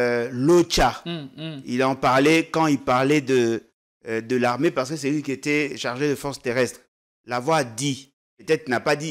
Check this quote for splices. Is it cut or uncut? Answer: uncut